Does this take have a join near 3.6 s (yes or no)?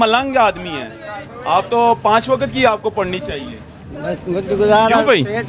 no